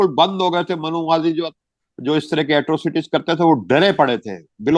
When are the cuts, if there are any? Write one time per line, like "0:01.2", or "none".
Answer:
none